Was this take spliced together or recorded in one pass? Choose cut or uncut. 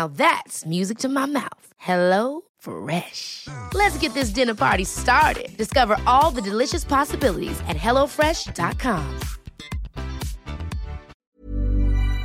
cut